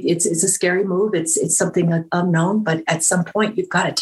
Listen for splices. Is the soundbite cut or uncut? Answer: uncut